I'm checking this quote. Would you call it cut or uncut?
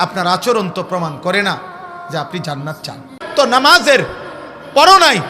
cut